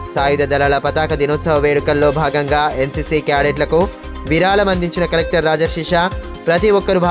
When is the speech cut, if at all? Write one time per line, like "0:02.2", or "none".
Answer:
none